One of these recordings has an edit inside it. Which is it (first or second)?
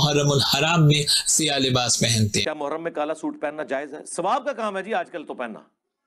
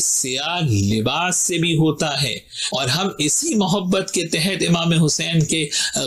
first